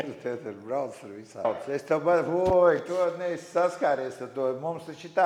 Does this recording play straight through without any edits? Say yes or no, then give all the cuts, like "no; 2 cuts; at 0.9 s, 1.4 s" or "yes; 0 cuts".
no; 1 cut; at 1.4 s